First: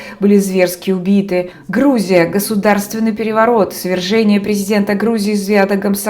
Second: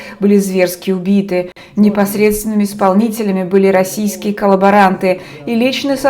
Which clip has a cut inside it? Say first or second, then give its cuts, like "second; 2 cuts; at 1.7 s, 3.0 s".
first; 1 cut; at 1.6 s